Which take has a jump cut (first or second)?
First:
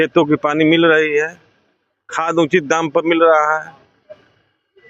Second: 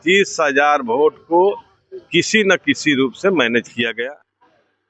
second